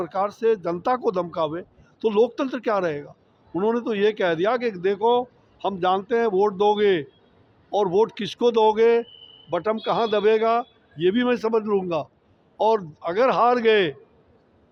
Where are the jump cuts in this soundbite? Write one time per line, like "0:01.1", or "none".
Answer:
none